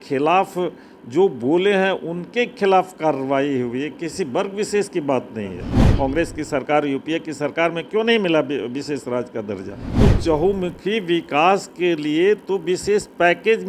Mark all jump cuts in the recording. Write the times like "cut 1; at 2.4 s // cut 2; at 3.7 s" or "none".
cut 1; at 5.8 s // cut 2; at 9.8 s